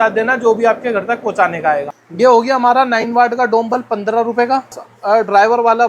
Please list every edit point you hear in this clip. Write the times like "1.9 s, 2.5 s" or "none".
2.0 s, 4.9 s